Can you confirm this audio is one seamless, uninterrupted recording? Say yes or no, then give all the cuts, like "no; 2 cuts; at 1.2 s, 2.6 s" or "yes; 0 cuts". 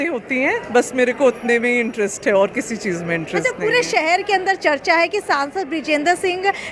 yes; 0 cuts